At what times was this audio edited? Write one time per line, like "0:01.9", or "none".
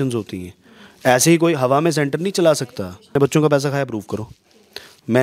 0:03.2